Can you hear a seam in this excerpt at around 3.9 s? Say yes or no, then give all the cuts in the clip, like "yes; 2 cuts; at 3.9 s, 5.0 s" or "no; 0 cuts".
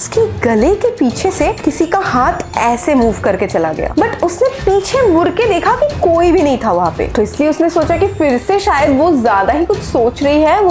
no; 0 cuts